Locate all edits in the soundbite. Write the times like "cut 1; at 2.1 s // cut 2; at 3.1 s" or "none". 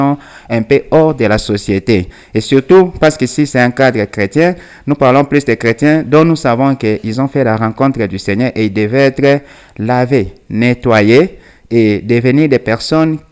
none